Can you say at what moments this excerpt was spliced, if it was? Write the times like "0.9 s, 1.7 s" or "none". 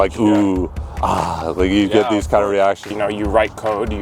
2.9 s